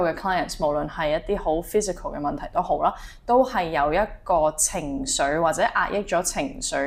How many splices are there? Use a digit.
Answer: 0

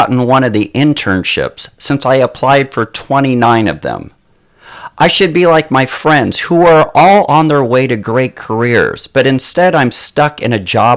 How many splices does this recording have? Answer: 1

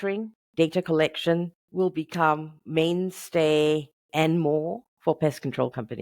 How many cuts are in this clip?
1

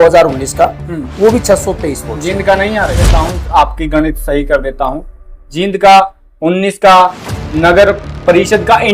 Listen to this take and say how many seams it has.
1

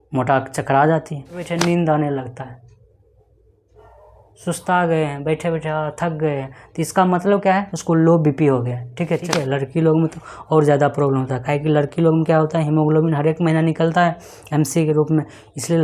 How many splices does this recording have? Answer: 2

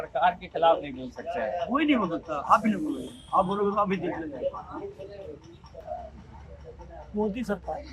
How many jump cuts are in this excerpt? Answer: 1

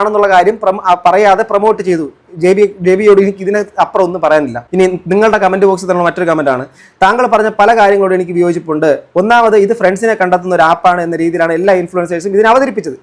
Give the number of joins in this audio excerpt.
1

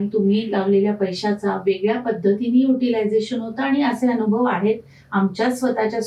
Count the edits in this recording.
0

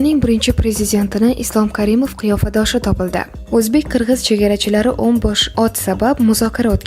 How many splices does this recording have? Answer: 1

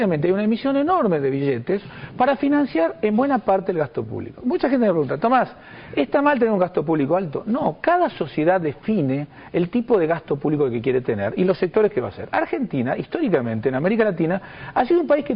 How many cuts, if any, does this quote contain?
1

